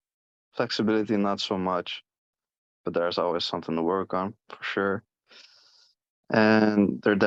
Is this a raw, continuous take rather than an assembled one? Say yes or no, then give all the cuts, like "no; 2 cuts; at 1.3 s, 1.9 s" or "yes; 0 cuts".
yes; 0 cuts